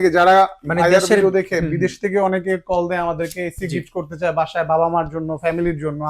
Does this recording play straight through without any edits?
yes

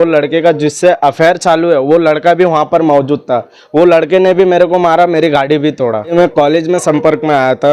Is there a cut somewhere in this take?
yes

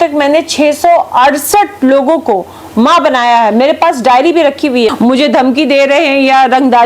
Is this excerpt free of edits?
no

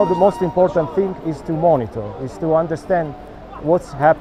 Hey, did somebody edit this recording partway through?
no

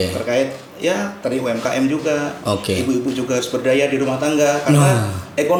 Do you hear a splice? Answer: no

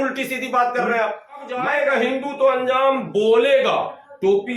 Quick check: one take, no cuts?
no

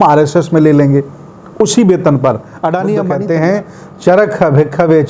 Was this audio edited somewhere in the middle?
yes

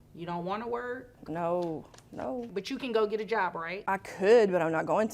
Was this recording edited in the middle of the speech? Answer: yes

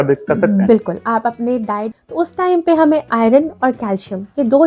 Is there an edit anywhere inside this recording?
yes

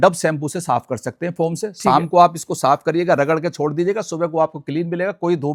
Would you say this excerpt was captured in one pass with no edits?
yes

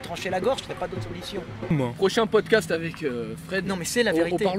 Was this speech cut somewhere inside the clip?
yes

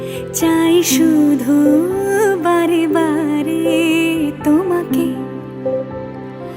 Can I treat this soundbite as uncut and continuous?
yes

